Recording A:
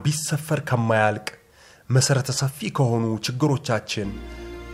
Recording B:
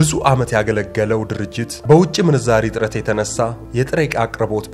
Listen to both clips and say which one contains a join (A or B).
B